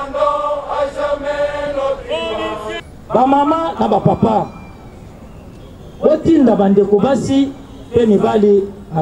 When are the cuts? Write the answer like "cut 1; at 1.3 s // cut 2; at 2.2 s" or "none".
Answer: cut 1; at 2.9 s